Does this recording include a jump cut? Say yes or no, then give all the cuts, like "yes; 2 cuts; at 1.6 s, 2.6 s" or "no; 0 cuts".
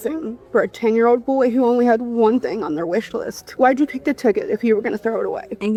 no; 0 cuts